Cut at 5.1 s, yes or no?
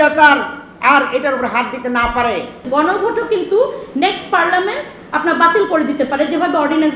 no